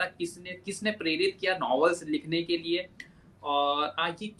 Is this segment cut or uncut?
uncut